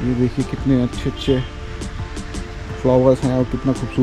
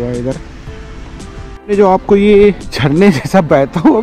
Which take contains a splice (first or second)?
second